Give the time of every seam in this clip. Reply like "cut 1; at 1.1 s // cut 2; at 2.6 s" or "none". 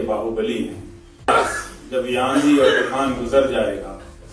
cut 1; at 1.3 s